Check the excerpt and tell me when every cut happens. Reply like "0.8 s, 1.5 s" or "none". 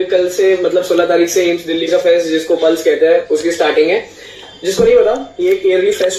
none